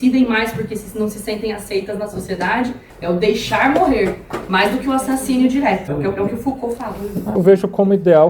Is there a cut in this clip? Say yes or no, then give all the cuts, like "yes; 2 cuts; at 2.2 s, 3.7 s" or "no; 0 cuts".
yes; 3 cuts; at 2.9 s, 5.9 s, 7.4 s